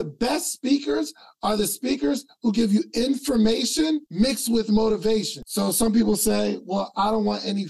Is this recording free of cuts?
no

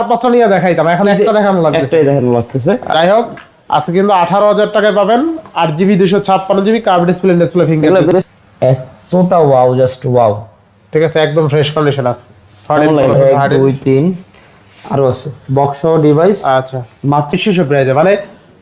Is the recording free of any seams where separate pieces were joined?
no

